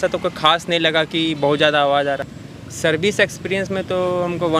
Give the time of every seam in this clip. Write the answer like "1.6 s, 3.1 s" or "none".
2.3 s